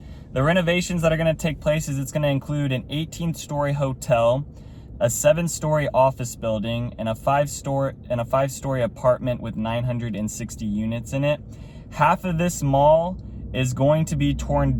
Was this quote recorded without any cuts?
yes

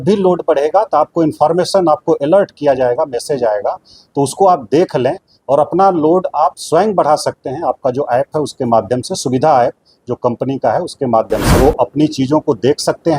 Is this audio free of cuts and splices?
no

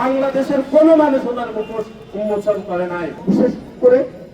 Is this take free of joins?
no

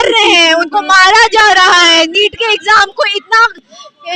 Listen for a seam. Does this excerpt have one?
no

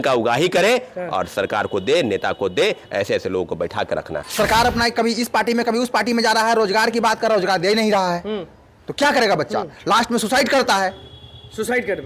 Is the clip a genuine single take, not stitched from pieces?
no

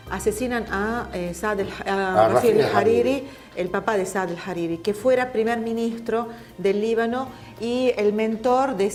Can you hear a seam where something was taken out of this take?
no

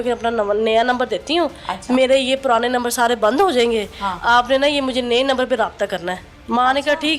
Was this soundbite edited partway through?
no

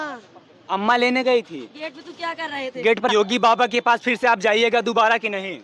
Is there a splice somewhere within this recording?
yes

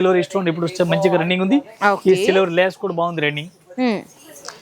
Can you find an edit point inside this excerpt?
no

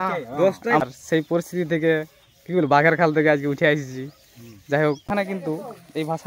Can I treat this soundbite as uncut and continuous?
no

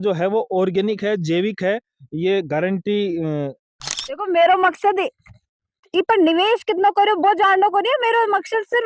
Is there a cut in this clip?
yes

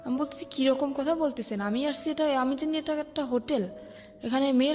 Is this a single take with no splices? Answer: yes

